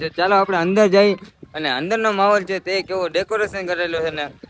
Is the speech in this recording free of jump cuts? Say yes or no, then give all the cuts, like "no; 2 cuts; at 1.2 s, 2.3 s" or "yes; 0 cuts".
yes; 0 cuts